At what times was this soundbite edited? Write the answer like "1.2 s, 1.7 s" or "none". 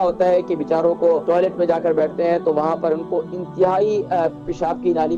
1.2 s